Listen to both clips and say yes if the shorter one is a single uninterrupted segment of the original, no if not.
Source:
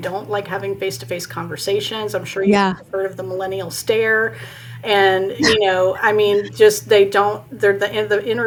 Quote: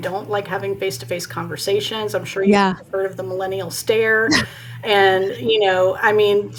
yes